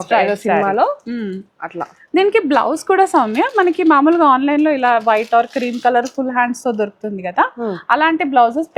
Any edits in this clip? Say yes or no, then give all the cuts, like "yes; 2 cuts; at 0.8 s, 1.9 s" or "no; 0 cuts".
no; 0 cuts